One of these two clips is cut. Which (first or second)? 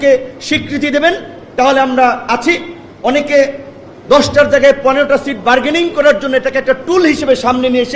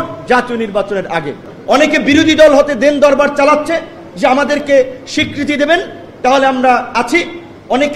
second